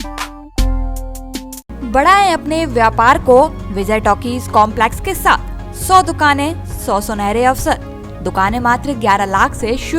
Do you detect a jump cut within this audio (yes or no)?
no